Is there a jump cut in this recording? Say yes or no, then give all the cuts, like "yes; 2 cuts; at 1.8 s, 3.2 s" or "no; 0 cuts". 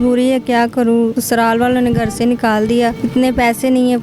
yes; 2 cuts; at 1.2 s, 3.0 s